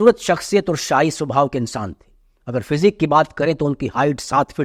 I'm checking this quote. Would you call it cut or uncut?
uncut